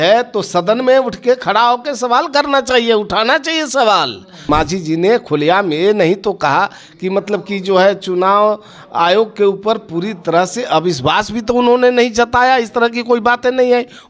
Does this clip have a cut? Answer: yes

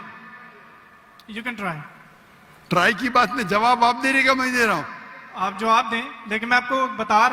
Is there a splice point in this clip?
no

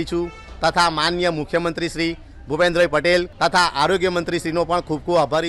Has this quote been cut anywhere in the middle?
yes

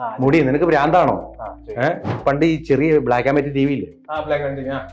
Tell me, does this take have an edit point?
yes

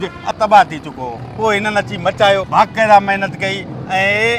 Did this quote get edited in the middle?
yes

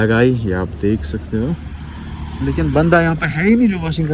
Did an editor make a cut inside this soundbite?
no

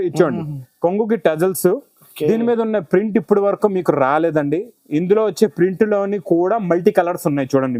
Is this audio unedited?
yes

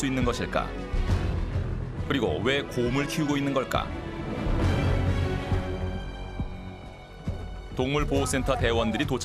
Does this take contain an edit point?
no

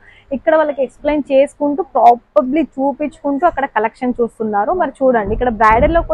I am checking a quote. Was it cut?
no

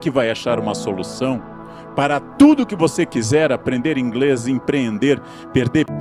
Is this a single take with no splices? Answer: yes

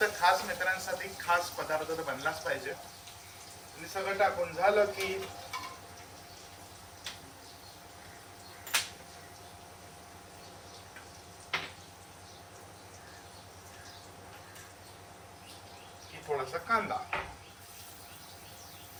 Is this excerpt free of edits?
yes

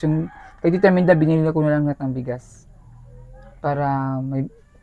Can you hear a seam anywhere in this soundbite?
no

